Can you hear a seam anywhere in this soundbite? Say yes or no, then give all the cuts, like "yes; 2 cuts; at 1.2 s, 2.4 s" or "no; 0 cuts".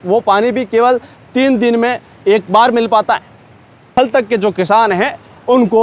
yes; 1 cut; at 3.9 s